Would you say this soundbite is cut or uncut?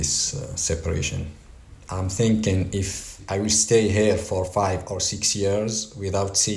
cut